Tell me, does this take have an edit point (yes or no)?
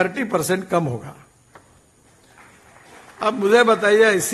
no